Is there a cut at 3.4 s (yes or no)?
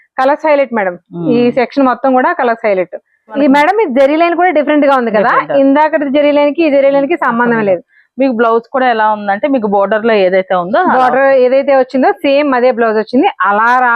yes